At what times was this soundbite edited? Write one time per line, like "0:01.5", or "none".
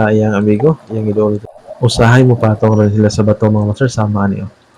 0:01.5